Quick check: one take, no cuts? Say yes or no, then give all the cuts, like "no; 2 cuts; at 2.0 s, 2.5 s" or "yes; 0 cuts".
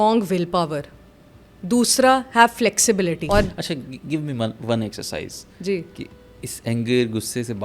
no; 1 cut; at 3.2 s